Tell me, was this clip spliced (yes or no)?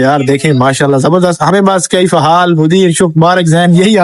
yes